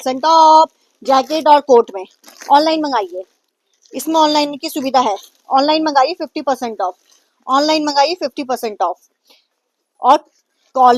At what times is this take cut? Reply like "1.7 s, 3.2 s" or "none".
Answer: none